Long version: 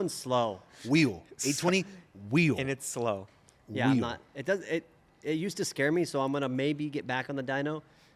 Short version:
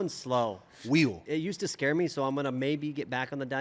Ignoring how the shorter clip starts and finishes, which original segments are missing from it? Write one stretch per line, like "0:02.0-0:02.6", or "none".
0:01.2-0:05.2